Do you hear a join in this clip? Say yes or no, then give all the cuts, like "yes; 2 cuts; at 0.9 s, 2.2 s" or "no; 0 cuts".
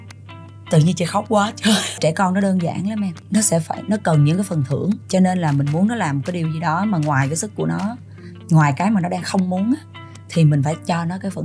yes; 3 cuts; at 2.0 s, 3.2 s, 5.0 s